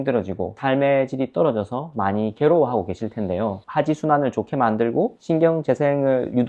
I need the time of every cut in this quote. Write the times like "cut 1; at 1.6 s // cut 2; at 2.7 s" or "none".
cut 1; at 3.6 s